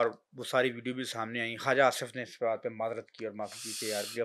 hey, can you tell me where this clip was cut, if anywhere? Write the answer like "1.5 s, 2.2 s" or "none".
none